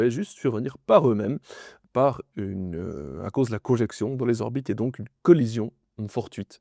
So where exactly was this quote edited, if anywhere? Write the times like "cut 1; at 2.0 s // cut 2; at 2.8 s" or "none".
none